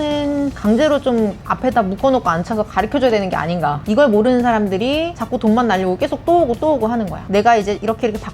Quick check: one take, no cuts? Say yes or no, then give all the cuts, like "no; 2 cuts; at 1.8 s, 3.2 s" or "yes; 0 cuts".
no; 3 cuts; at 3.8 s, 5.2 s, 7.2 s